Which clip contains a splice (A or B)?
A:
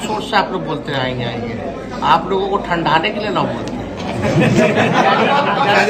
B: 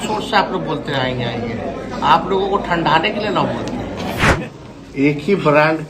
B